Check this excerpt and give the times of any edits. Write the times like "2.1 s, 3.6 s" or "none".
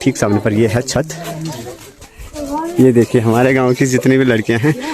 2.0 s